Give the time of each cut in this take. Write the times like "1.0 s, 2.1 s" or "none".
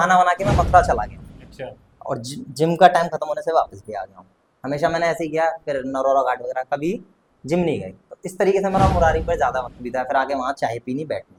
none

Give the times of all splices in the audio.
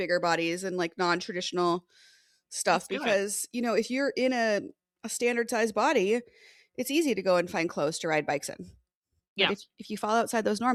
none

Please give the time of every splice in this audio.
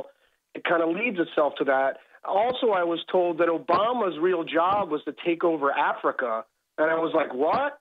none

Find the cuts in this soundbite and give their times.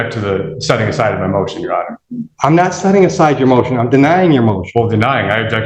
none

